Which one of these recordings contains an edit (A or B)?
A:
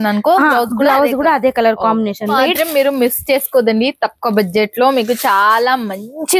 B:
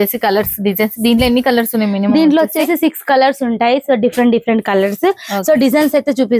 A